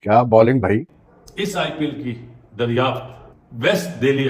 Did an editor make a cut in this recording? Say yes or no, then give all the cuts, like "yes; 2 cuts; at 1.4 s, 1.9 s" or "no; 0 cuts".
yes; 1 cut; at 1.1 s